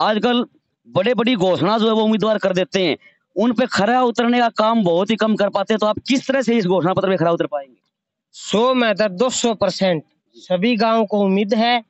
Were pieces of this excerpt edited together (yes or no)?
no